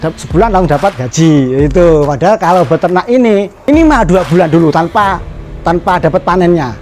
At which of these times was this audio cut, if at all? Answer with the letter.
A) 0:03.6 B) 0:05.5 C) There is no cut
A